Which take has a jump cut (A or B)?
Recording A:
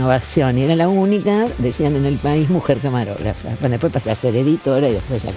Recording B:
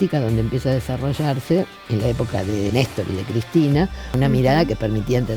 B